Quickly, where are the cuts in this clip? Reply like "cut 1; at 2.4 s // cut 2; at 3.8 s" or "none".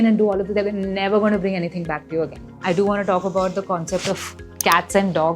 cut 1; at 2.5 s